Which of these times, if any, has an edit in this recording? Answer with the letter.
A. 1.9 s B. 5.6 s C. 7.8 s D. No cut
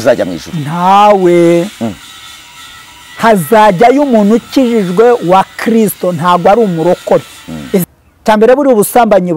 C